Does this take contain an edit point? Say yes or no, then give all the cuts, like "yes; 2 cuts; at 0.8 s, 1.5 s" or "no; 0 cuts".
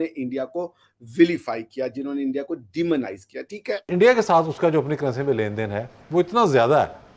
yes; 1 cut; at 3.8 s